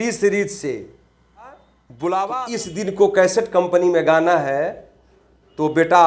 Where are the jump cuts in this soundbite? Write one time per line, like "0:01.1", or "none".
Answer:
0:02.4